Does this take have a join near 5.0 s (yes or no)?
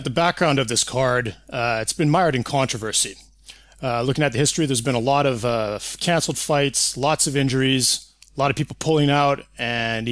yes